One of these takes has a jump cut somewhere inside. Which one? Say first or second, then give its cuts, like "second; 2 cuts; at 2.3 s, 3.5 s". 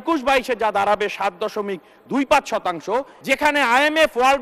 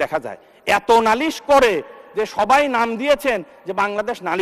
first; 1 cut; at 3.1 s